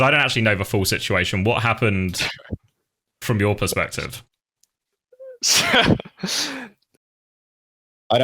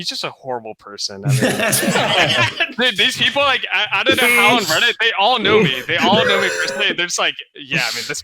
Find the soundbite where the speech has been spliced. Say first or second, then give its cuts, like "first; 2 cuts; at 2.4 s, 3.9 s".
first; 1 cut; at 7.3 s